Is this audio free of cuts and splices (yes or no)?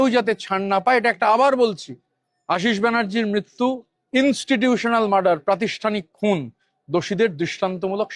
yes